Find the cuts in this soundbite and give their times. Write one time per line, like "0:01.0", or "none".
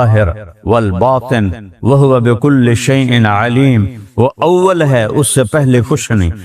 none